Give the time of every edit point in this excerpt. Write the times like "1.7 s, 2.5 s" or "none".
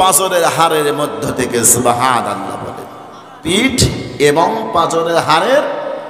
3.5 s

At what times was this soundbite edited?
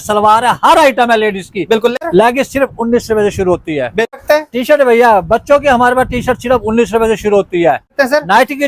2.0 s, 4.1 s, 7.9 s

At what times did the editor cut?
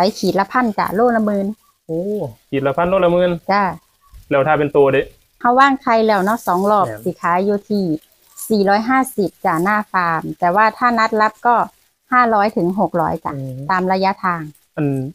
none

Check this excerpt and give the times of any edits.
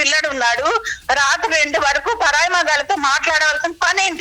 none

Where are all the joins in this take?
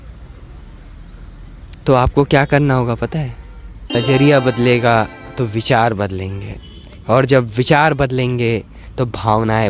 3.9 s

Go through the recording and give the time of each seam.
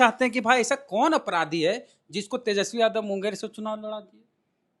none

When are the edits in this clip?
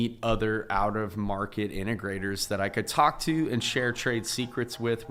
none

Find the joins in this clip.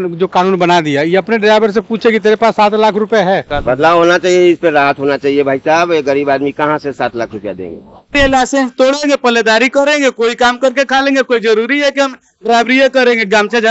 3.5 s, 8.1 s

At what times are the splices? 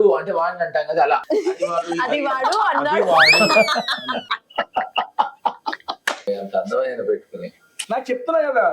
1.2 s, 6.3 s

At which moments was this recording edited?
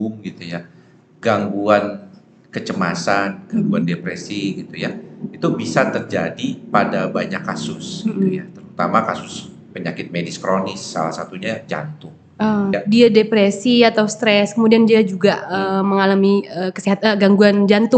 12.7 s

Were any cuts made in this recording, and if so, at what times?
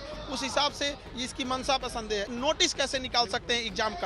2.3 s

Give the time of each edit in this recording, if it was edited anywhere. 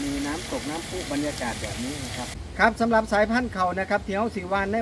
2.6 s

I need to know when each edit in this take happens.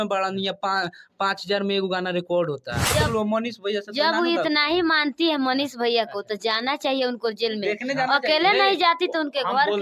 2.9 s

